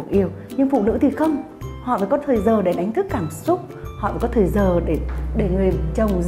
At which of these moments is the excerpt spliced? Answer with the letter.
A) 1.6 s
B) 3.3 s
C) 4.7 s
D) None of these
D